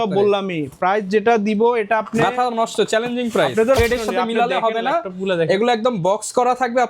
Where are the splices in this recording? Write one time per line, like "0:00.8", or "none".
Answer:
0:03.8

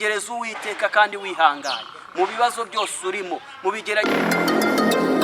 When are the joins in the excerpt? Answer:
none

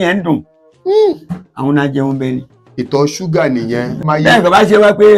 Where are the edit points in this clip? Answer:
0:04.1

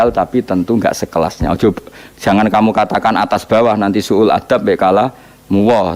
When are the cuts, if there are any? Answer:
none

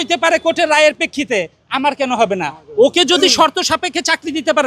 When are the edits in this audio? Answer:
none

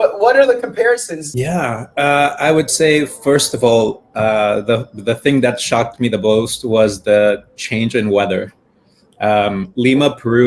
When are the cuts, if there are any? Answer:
0:01.2

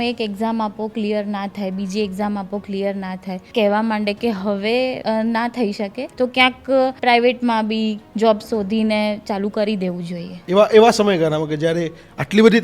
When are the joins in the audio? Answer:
0:03.4
0:05.0
0:06.0
0:07.0
0:10.3

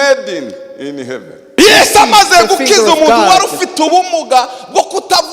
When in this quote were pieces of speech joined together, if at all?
0:01.5

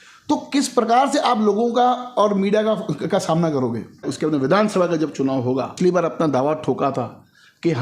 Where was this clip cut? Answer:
0:04.1
0:05.7

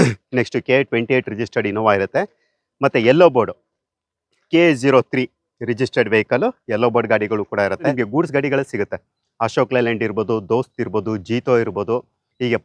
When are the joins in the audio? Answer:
0:07.9

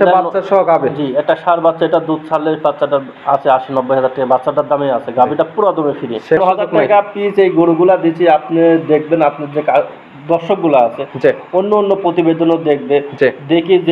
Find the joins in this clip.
0:06.4

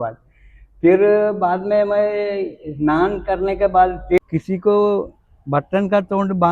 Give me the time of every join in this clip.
0:04.2

